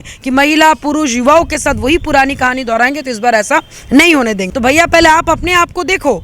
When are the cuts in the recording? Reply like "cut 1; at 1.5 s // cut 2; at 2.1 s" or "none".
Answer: cut 1; at 4.5 s